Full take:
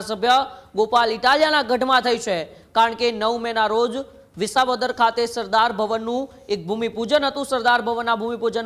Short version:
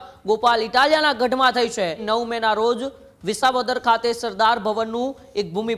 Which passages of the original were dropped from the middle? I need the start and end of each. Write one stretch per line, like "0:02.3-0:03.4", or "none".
0:02.5-0:03.2